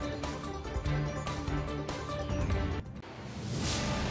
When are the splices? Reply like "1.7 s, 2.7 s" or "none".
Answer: 2.7 s